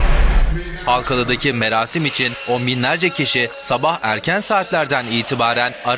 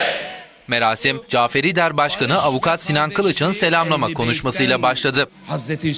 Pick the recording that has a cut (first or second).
first